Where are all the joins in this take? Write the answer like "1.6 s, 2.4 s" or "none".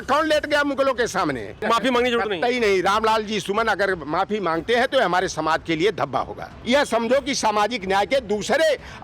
1.6 s, 6.5 s